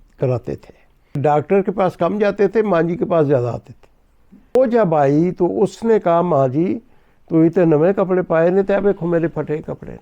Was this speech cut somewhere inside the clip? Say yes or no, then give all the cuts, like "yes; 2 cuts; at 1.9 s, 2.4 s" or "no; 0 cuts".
yes; 2 cuts; at 1.2 s, 4.6 s